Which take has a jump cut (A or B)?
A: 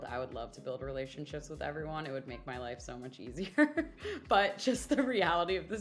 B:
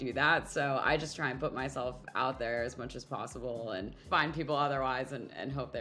B